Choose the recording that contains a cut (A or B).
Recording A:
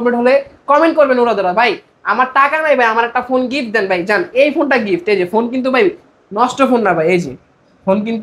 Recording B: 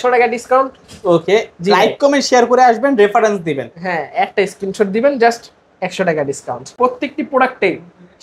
B